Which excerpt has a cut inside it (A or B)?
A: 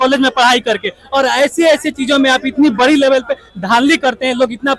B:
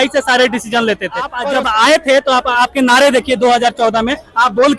B